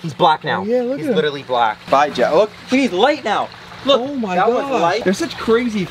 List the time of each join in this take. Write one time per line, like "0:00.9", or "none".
0:01.9
0:05.0